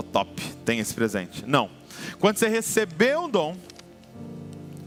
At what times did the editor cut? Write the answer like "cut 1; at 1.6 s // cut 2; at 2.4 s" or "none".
none